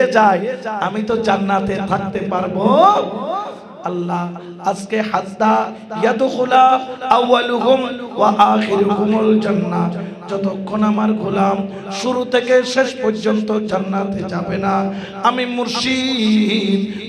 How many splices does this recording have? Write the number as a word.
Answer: zero